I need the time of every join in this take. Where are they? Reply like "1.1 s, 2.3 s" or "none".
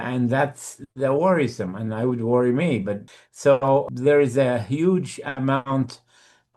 3.1 s, 3.9 s

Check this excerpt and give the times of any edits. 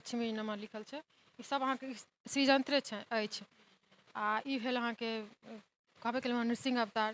none

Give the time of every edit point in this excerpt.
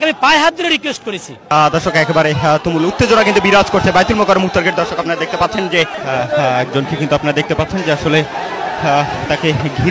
1.4 s, 6.0 s

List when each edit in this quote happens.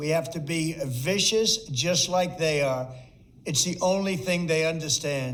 none

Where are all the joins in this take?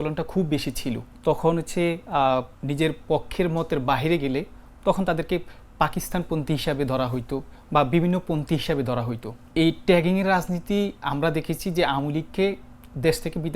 1.1 s, 2.6 s, 7.5 s, 9.3 s

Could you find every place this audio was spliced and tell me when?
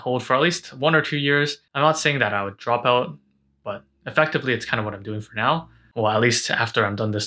none

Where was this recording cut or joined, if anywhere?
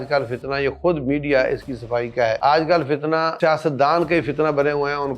2.4 s, 3.3 s

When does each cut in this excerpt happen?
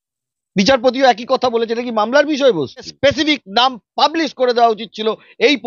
2.9 s

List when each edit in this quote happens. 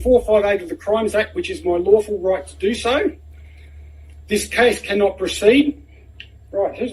none

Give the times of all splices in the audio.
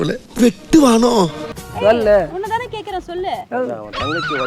1.4 s

